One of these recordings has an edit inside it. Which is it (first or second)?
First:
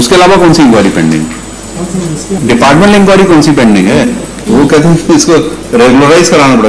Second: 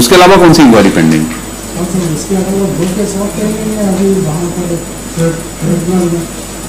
first